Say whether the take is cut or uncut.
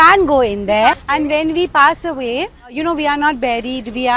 cut